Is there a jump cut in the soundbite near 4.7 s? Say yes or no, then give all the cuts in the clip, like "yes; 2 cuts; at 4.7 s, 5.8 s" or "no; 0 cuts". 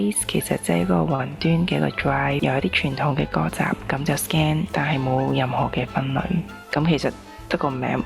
yes; 3 cuts; at 2.4 s, 4.7 s, 6.5 s